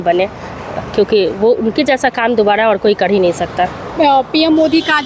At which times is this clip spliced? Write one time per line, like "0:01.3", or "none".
none